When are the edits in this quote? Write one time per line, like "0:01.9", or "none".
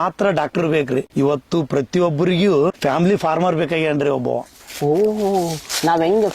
0:01.1
0:02.8